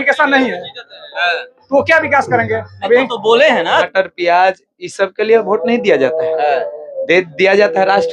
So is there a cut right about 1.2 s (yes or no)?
no